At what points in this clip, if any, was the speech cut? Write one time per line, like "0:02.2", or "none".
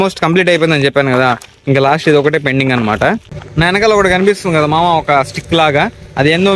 0:03.3